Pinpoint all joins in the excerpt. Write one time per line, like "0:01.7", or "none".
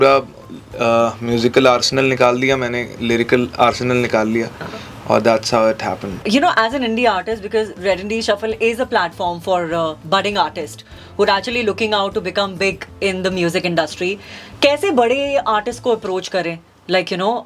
0:06.2